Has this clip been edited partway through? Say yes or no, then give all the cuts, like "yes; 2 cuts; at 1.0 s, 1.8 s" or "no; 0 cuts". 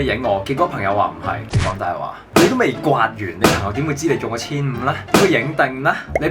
no; 0 cuts